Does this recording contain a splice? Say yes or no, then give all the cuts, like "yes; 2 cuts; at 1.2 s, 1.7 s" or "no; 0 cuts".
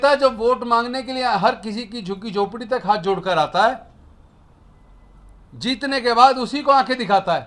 no; 0 cuts